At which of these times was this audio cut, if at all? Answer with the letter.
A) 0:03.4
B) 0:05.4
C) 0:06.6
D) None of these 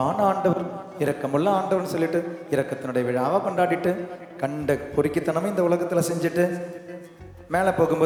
D